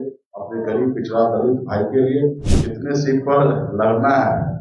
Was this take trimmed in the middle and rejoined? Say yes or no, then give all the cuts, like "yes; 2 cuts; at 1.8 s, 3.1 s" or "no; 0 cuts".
yes; 1 cut; at 2.5 s